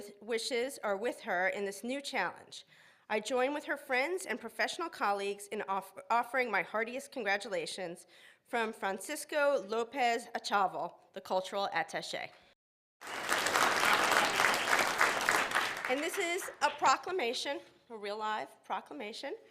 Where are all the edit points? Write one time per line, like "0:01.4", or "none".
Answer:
0:14.3